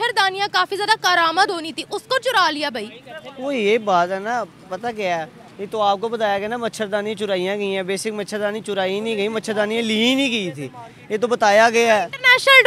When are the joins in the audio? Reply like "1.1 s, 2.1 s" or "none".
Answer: none